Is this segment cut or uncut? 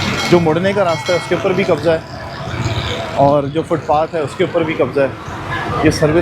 uncut